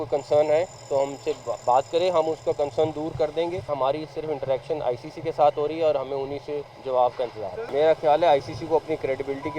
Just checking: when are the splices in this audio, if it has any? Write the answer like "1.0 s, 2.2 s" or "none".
3.7 s, 6.7 s, 7.6 s